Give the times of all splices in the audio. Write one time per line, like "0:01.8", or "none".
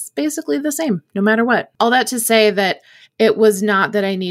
0:01.7